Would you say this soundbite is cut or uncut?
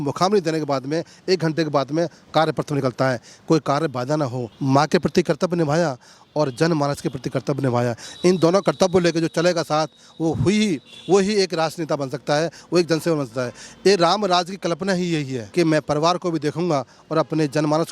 cut